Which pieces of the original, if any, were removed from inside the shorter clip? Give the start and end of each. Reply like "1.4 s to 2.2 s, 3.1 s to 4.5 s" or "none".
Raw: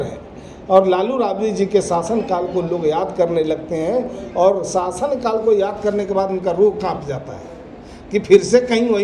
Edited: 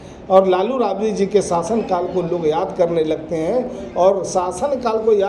none